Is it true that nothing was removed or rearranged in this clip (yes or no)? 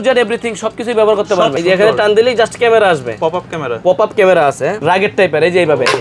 no